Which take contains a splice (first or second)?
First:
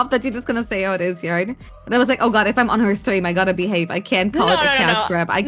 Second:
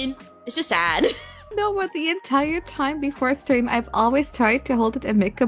second